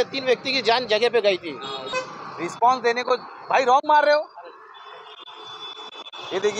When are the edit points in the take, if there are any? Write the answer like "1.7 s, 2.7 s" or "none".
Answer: 1.9 s